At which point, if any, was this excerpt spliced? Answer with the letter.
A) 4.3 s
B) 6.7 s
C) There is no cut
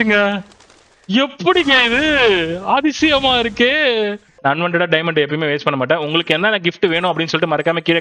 A